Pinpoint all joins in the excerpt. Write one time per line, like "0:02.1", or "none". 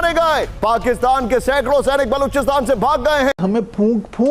0:03.4